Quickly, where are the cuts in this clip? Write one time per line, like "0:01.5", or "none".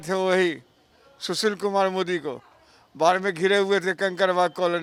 none